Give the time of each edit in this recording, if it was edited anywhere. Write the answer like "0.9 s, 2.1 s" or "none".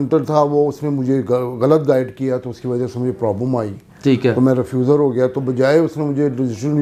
none